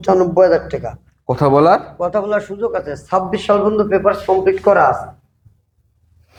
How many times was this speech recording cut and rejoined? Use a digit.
0